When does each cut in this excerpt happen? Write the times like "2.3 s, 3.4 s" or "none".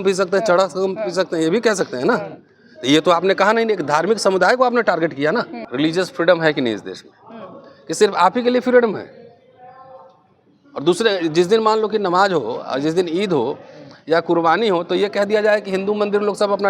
5.6 s